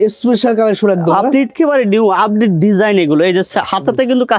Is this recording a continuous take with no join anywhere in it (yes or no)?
no